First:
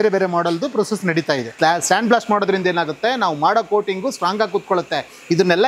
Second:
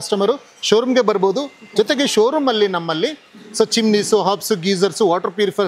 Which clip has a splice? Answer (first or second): first